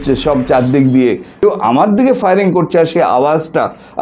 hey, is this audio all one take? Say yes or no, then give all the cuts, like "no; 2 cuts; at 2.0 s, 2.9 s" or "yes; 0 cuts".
no; 1 cut; at 1.4 s